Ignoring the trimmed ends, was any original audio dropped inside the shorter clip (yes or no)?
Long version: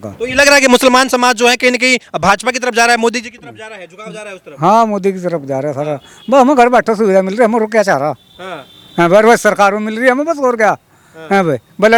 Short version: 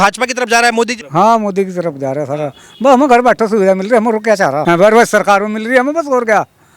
yes